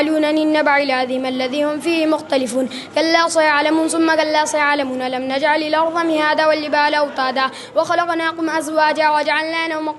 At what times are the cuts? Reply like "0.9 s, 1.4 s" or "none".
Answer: none